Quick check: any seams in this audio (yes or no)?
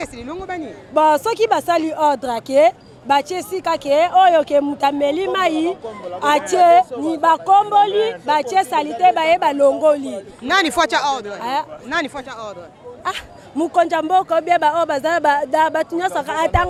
no